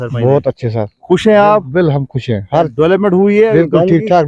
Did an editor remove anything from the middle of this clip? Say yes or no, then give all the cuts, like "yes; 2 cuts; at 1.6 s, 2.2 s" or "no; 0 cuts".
no; 0 cuts